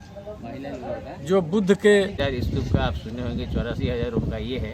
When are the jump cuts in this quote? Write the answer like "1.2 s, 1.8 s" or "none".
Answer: 2.2 s